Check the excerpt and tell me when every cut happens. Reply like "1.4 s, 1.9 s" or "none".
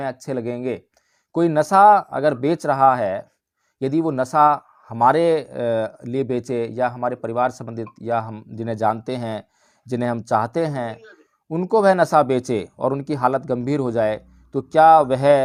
none